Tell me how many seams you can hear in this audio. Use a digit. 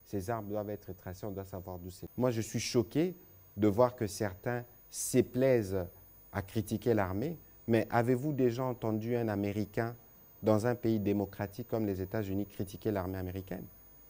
1